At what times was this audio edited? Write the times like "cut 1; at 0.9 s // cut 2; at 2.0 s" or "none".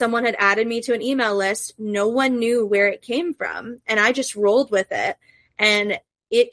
none